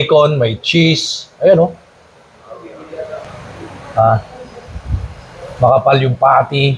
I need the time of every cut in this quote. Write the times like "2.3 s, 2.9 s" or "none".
3.0 s